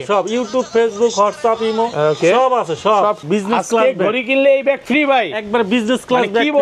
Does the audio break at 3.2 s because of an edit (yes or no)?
yes